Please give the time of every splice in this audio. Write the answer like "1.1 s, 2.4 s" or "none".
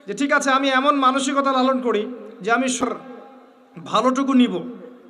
2.8 s